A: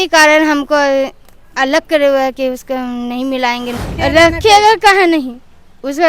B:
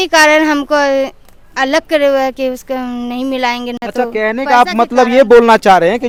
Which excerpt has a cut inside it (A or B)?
A